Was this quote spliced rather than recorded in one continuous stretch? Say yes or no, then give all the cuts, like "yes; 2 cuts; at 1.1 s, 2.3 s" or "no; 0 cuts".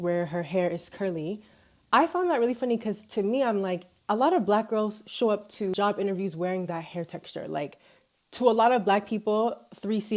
no; 0 cuts